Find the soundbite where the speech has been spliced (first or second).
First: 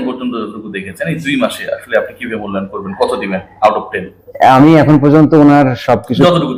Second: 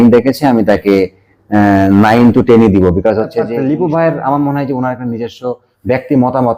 second